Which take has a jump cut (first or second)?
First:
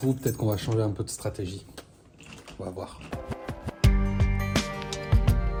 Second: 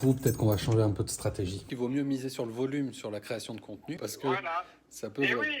second